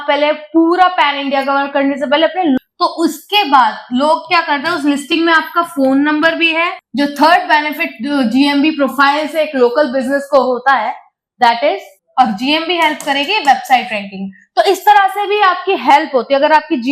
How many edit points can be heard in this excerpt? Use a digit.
3